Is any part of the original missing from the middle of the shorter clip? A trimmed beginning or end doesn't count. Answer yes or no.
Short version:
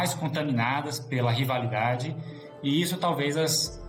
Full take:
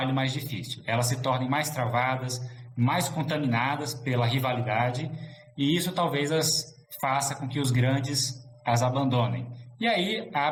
no